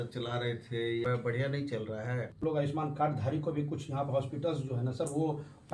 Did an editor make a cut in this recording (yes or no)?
yes